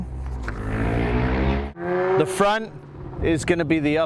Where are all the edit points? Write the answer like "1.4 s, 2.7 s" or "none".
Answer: 1.8 s